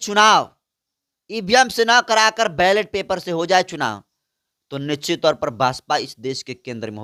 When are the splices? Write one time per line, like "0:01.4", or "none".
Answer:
none